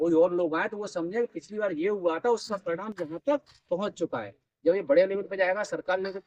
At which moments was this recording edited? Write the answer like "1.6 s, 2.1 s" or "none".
none